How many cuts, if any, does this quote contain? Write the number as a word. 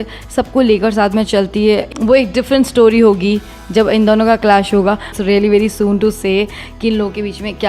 two